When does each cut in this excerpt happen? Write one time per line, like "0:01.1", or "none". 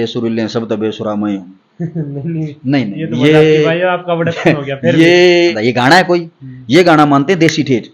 0:05.6